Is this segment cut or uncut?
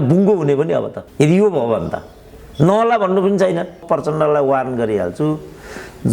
cut